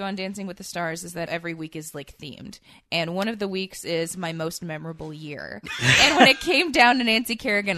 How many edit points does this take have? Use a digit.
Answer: 1